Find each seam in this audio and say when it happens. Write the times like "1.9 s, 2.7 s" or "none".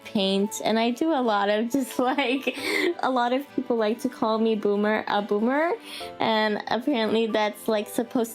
3.0 s

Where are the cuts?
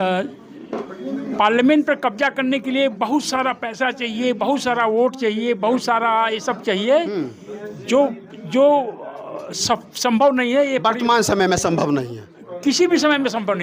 none

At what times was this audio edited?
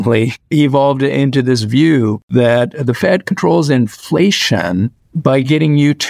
2.2 s

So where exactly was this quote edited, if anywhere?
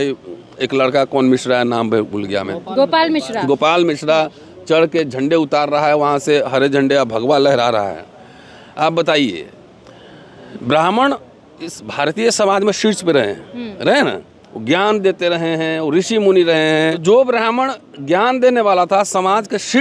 17.0 s

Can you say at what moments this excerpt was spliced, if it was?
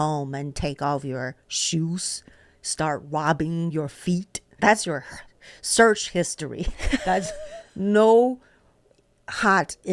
4.5 s

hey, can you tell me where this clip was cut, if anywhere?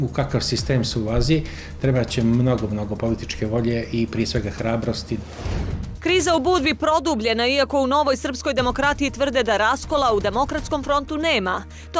5.3 s

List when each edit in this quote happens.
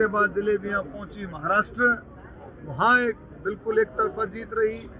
none

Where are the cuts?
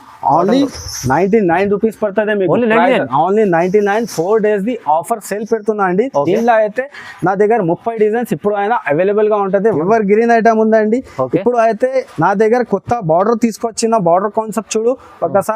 9.8 s

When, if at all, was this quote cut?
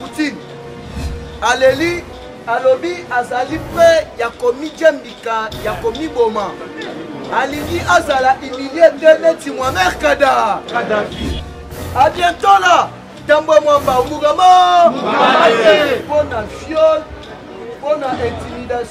11.4 s

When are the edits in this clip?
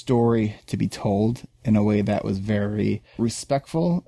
3.1 s

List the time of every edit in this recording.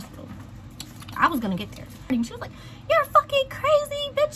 2.1 s

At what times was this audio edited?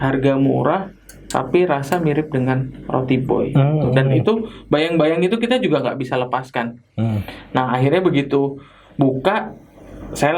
none

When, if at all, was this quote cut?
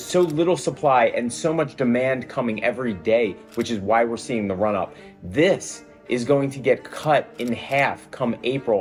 none

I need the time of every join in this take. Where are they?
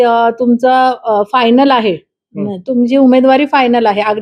none

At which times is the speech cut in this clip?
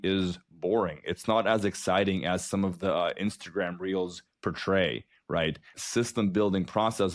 none

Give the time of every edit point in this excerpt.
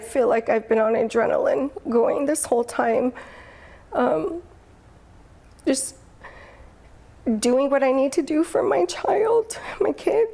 none

